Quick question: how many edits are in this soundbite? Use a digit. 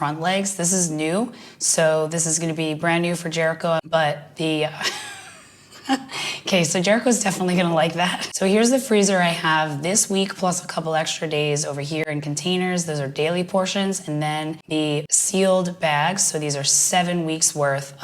3